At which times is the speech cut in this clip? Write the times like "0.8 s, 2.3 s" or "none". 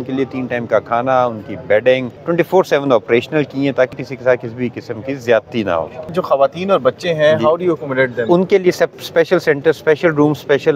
2.1 s, 4.0 s, 6.2 s